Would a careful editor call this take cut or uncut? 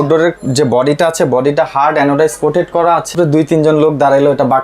cut